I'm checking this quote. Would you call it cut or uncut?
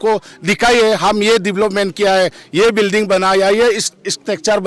uncut